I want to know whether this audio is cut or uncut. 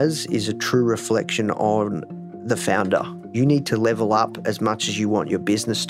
cut